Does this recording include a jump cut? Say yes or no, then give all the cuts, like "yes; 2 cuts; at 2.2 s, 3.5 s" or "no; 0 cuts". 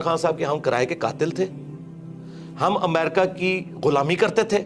no; 0 cuts